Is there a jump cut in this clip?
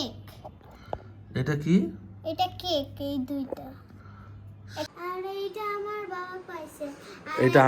yes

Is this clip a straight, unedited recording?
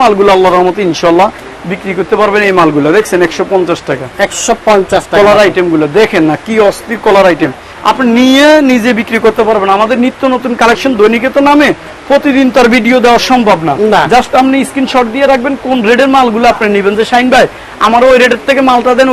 yes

